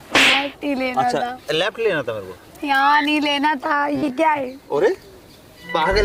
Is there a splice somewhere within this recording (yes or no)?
no